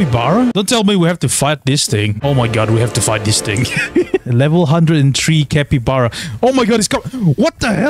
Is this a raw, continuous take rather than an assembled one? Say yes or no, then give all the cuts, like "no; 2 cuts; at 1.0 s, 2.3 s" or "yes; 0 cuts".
yes; 0 cuts